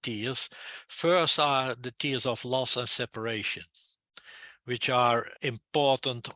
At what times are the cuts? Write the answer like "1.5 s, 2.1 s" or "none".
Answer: 5.3 s

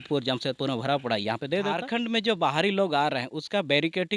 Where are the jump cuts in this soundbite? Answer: 1.8 s

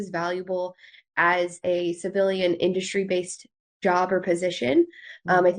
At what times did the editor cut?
1.6 s

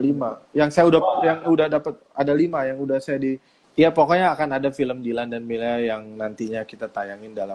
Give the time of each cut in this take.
3.5 s

